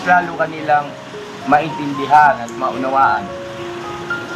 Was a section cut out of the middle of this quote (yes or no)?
no